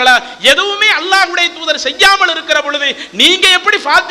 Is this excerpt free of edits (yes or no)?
yes